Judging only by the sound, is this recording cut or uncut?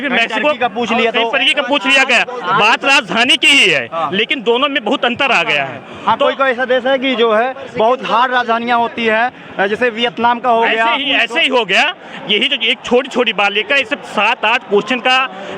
uncut